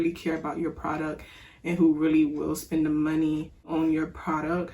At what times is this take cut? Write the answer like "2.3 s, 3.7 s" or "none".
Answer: 3.7 s